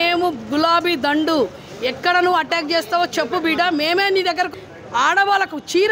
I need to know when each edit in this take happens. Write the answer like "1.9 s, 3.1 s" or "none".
4.5 s